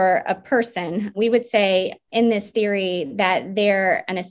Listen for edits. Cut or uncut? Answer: cut